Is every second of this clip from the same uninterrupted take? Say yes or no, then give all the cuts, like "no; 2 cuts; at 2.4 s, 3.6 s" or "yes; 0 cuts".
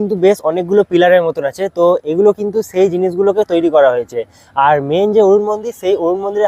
yes; 0 cuts